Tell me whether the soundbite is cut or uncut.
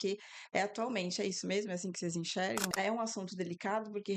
cut